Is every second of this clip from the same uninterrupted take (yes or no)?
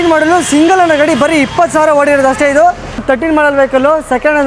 no